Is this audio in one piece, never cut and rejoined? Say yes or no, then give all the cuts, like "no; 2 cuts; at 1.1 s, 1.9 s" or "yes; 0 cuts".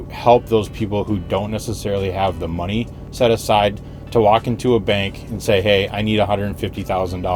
yes; 0 cuts